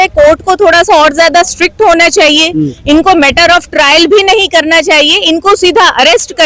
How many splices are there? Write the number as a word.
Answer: zero